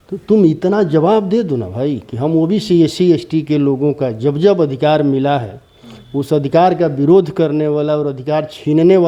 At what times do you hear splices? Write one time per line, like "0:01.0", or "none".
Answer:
none